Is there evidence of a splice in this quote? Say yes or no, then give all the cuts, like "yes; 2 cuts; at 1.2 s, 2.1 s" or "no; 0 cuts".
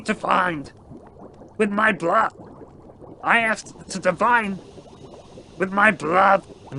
no; 0 cuts